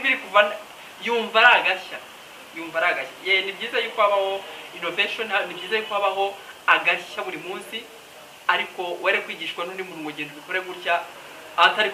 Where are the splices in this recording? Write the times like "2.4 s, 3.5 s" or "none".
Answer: 10.2 s